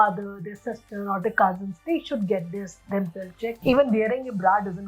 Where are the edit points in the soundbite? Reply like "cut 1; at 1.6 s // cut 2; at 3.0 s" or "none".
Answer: cut 1; at 3.6 s